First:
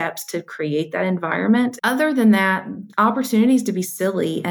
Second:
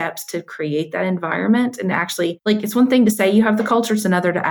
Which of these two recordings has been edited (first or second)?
first